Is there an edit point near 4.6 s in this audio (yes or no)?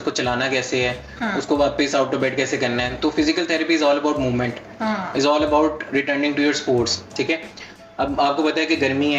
no